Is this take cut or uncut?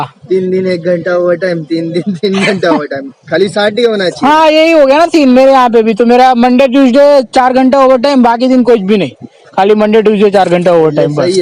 uncut